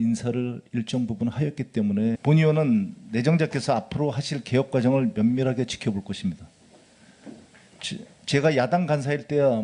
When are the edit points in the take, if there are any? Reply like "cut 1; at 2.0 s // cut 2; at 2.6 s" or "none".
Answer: none